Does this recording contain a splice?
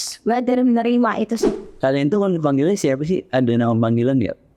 yes; 1 cut; at 1.6 s

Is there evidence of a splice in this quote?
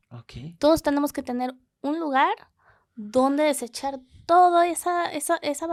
no; 0 cuts

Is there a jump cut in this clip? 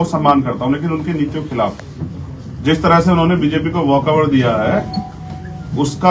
no; 0 cuts

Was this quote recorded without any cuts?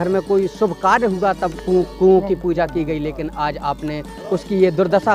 yes; 0 cuts

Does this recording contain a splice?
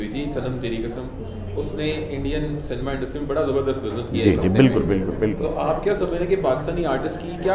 no; 0 cuts

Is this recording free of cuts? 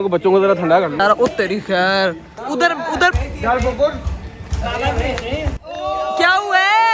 no; 2 cuts; at 1.0 s, 2.3 s

